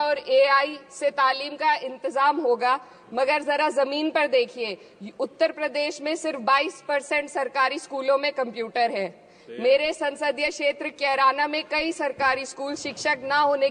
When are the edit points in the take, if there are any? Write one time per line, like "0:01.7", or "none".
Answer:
none